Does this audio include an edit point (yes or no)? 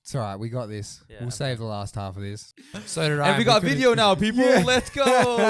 yes